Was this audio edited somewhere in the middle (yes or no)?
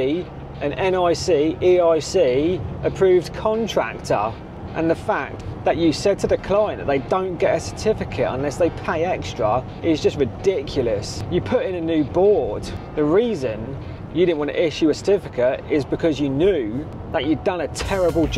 yes